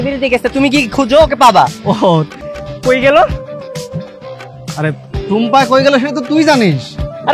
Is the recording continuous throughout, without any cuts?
no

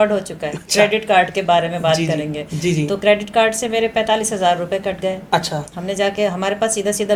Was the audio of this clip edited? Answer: no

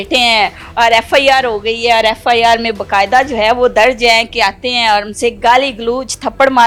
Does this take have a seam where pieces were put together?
no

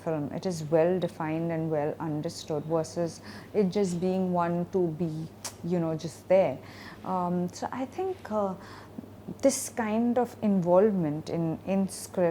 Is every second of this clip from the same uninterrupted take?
yes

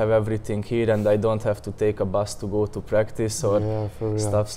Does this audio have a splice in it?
no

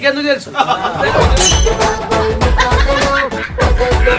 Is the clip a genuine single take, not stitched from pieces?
yes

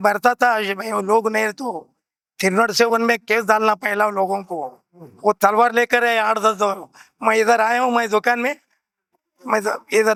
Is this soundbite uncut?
yes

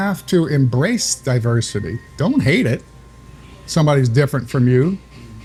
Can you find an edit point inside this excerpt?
no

